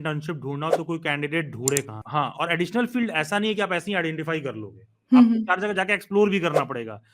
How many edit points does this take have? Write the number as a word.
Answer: one